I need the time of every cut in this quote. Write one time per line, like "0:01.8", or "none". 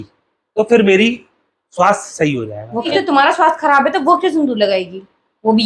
0:02.9